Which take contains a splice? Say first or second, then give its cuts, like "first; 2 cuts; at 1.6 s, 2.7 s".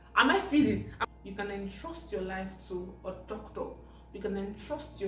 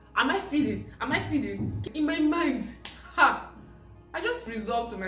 first; 1 cut; at 0.9 s